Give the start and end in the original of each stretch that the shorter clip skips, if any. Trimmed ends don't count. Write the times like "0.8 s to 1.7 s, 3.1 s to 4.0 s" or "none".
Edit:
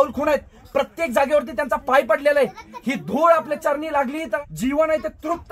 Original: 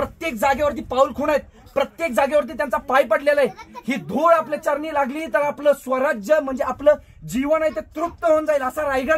5.4 s to 7.1 s